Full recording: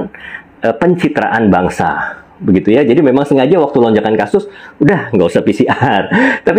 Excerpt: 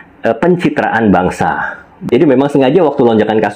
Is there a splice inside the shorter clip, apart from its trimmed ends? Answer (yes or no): yes